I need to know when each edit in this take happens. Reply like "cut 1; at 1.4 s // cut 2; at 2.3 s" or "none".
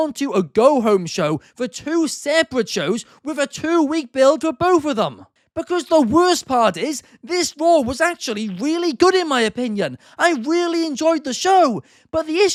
none